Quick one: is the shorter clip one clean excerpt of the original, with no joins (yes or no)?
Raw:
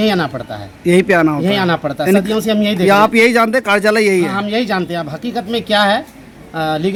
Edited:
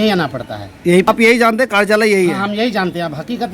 no